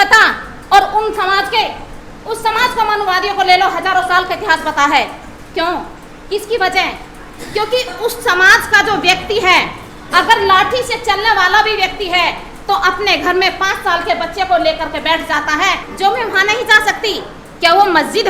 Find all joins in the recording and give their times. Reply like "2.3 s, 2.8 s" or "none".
15.9 s